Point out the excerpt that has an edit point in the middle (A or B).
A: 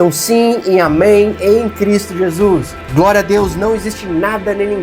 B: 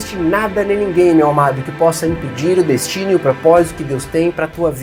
A